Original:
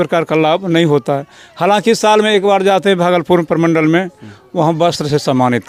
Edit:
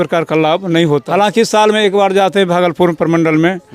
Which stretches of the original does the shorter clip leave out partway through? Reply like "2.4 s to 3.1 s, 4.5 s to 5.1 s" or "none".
1.1 s to 1.6 s